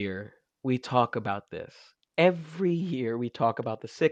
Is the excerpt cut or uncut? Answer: uncut